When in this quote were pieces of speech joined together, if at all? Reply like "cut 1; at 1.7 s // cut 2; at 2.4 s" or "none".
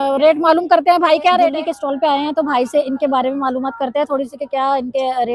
cut 1; at 1.6 s